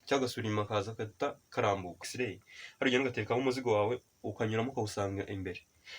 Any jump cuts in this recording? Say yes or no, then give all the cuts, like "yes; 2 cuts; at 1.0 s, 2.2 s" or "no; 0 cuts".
yes; 1 cut; at 2.0 s